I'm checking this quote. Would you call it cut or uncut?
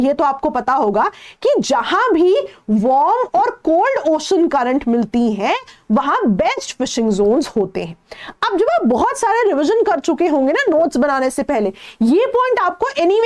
uncut